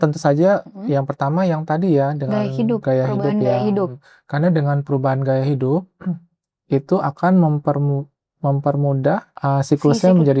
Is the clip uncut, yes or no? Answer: no